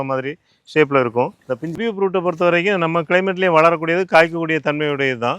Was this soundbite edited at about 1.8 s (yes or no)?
yes